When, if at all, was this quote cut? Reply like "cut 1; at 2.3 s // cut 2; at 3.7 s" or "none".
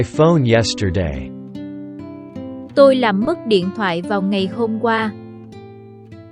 cut 1; at 1.1 s // cut 2; at 2.7 s